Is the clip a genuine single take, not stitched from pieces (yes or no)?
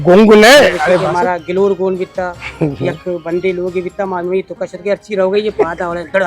no